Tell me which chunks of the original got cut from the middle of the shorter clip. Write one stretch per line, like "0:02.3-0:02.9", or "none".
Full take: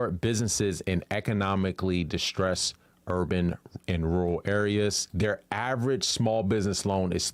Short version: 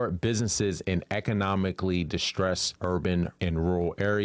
0:02.7-0:03.0
0:03.6-0:03.8